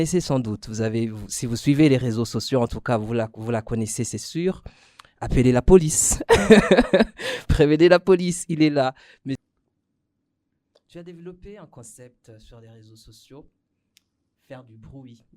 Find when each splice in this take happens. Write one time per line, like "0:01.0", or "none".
0:09.5